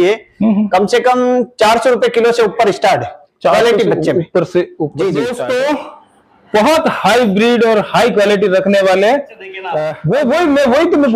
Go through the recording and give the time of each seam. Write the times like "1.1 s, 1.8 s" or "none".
5.3 s, 9.8 s